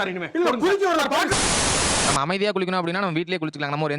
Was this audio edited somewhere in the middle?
yes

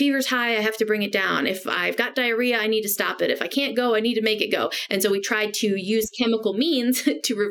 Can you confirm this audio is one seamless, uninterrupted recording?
yes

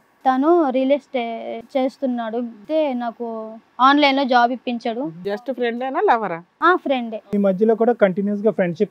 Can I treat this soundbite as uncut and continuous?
no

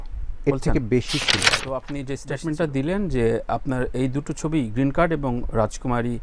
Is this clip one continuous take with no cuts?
no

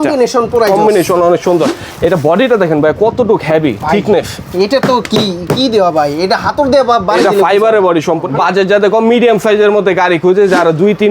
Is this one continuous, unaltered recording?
no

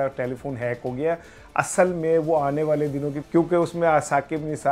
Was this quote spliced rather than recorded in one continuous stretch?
yes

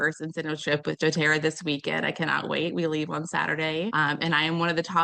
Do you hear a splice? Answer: yes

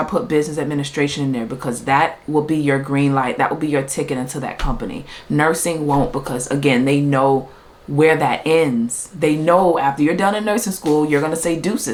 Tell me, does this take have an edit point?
no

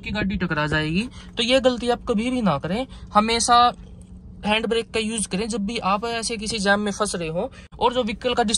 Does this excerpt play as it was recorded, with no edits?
no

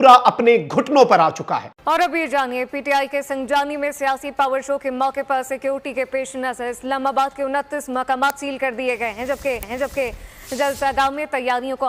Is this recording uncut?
yes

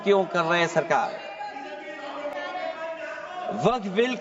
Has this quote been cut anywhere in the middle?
no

